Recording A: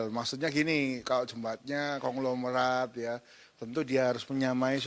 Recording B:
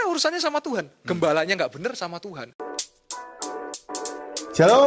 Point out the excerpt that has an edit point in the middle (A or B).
B